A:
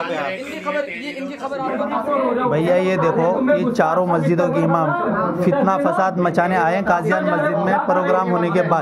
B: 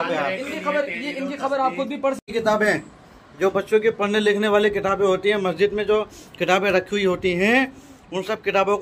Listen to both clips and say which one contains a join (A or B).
A